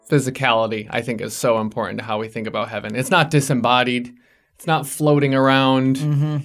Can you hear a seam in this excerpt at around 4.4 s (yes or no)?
no